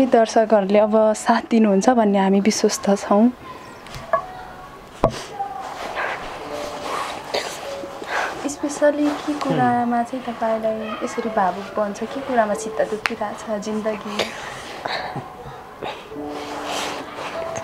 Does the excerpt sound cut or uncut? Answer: uncut